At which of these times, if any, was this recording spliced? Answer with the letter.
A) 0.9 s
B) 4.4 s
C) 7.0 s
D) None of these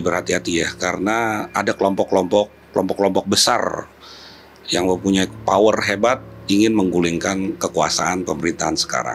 D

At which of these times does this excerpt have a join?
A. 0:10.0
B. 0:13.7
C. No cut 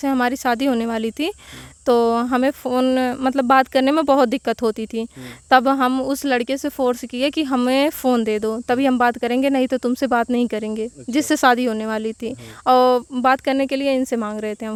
C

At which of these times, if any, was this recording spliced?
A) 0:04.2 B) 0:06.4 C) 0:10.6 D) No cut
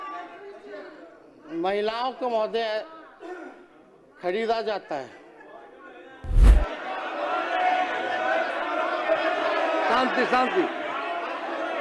B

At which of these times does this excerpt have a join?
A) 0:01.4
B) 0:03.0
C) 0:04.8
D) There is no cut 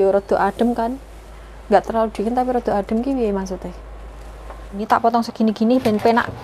C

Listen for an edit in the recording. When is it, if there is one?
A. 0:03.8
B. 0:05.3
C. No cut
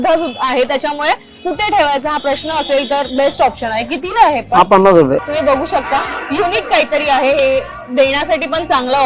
B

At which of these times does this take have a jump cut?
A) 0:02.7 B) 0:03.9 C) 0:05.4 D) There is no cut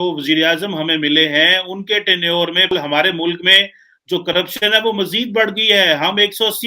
A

